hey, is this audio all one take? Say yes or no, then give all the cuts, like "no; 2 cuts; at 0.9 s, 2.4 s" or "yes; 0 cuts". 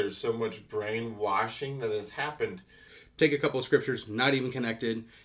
no; 1 cut; at 3.0 s